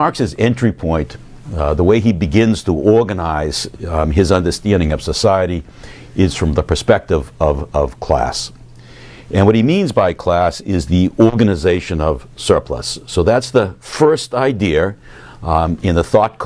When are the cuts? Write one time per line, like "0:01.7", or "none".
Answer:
0:06.3